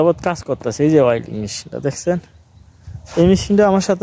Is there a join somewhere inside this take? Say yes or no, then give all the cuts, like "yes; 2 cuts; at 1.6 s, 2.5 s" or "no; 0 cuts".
no; 0 cuts